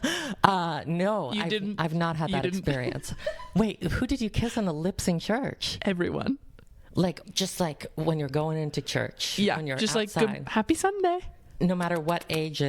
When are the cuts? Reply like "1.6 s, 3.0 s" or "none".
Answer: 7.2 s

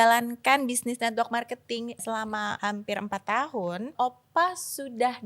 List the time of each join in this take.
2.2 s, 3.9 s

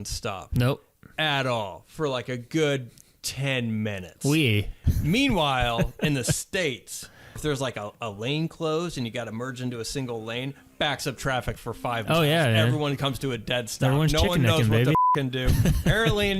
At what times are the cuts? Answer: 7.4 s

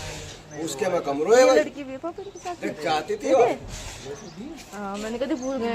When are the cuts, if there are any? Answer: none

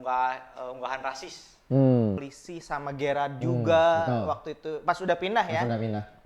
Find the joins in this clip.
2.2 s

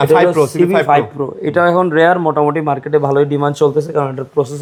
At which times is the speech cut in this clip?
none

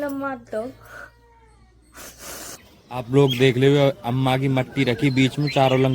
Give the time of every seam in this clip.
2.6 s

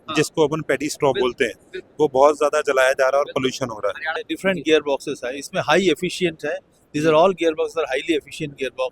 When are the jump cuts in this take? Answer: 4.2 s

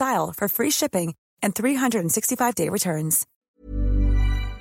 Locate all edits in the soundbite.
3.3 s

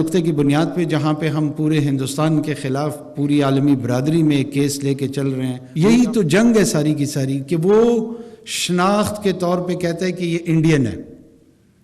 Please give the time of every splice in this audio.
5.6 s

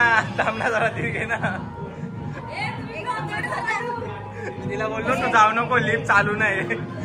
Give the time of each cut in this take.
none

